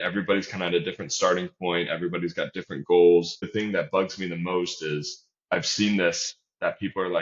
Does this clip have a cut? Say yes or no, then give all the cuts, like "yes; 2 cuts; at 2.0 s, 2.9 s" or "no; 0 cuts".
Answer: yes; 1 cut; at 3.5 s